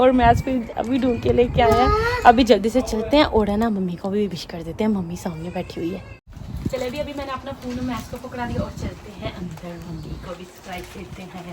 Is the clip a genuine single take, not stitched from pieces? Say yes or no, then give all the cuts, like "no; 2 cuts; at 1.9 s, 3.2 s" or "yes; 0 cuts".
yes; 0 cuts